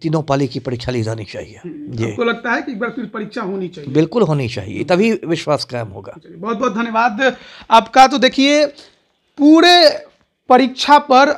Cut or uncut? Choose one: uncut